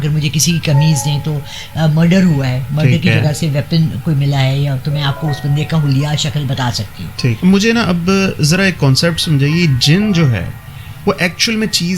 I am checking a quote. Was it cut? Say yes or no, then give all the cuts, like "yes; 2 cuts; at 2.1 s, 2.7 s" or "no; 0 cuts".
yes; 1 cut; at 7.4 s